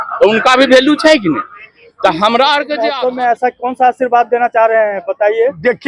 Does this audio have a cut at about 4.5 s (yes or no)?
no